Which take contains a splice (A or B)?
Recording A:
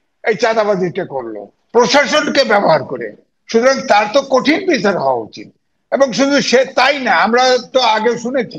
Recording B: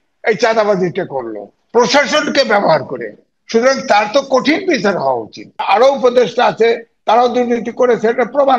B